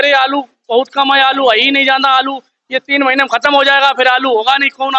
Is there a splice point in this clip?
no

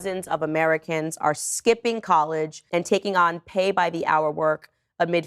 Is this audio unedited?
yes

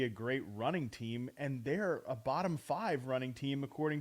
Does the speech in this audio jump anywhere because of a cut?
no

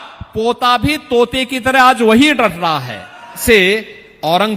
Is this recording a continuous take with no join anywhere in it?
no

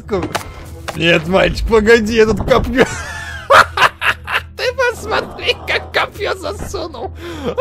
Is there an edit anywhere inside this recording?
no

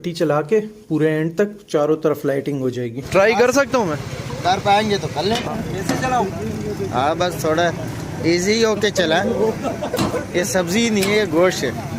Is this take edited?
yes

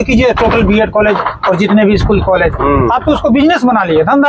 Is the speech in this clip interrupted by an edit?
no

